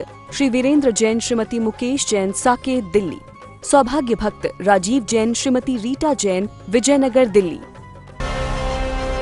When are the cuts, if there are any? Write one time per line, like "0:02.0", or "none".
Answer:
0:08.2